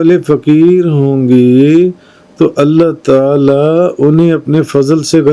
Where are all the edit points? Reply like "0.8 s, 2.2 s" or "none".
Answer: none

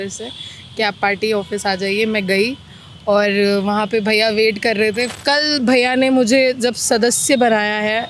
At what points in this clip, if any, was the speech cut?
5.1 s

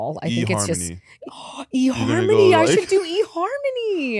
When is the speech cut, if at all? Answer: 1.2 s

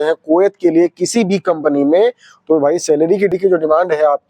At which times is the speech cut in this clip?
3.3 s

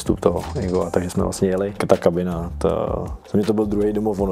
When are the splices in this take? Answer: 1.8 s, 3.1 s

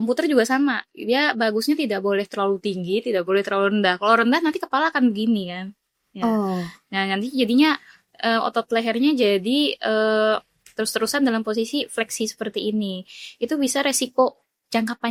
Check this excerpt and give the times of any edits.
none

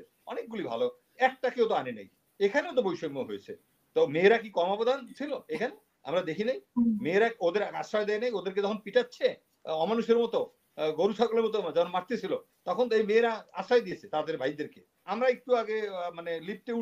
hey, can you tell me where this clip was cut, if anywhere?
15.0 s

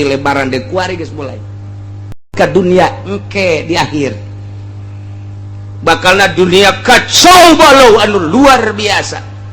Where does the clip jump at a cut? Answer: 2.3 s

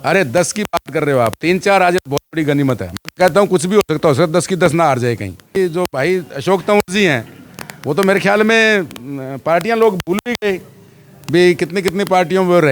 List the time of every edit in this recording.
5.6 s

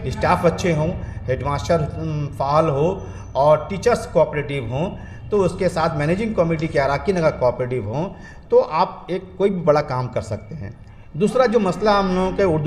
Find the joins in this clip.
none

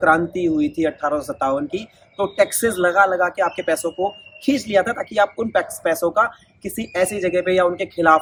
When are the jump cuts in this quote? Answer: none

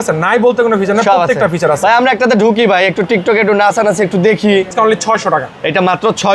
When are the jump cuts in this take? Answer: 4.7 s

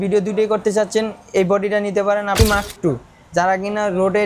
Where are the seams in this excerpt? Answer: 2.4 s

